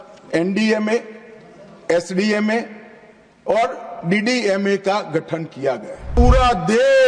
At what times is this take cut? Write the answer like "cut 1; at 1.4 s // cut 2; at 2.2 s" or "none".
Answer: cut 1; at 6.1 s